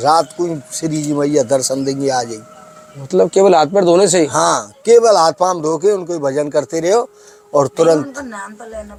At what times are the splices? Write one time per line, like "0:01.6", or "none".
none